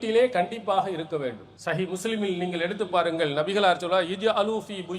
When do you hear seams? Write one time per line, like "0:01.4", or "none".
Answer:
0:01.5